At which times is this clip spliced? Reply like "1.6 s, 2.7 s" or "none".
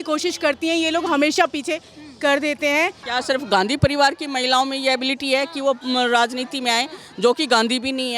3.0 s